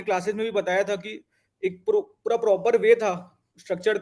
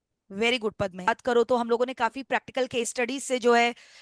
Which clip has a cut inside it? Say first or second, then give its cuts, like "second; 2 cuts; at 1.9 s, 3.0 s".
second; 1 cut; at 1.1 s